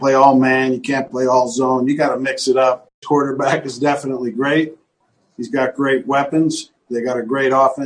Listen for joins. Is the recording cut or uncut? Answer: cut